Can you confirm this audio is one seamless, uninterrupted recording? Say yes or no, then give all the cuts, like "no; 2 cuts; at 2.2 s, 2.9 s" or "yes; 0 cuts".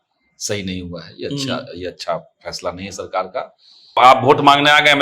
no; 1 cut; at 3.9 s